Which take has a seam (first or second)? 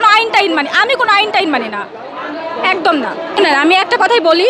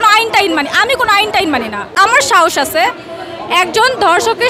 second